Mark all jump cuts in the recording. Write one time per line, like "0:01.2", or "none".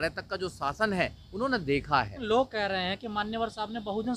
0:02.2